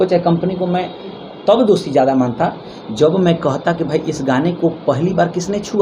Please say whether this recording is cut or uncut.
uncut